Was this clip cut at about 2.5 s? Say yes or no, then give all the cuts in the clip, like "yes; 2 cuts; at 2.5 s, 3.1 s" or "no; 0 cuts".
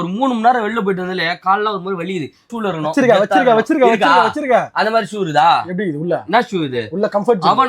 yes; 1 cut; at 2.5 s